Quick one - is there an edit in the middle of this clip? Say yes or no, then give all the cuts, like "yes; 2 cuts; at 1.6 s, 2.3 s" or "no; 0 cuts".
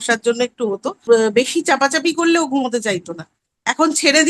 yes; 1 cut; at 1.0 s